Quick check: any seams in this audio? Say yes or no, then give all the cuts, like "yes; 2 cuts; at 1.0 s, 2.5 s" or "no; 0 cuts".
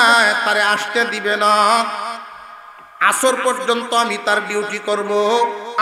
no; 0 cuts